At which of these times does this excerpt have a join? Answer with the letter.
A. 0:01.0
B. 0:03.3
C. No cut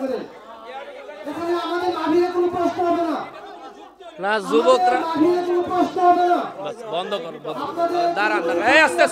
C